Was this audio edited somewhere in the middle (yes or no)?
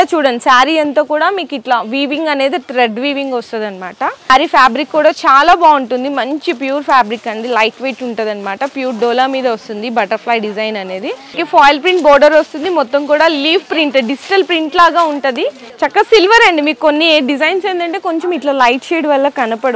yes